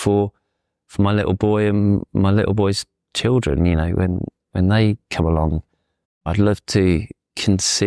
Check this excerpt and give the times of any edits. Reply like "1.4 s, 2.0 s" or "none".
6.2 s